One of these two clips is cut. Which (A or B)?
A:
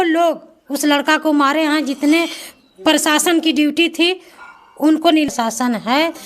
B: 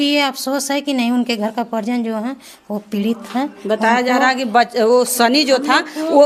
A